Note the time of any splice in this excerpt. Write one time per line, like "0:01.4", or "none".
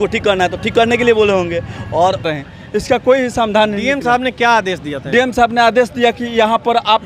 0:02.3